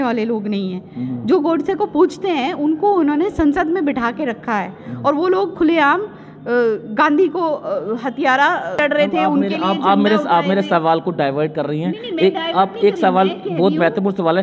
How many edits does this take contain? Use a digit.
1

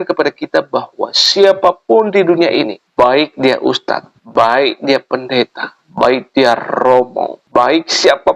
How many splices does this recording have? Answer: 3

